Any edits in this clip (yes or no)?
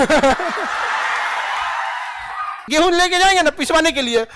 yes